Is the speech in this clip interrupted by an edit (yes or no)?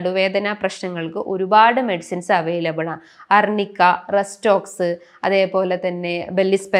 no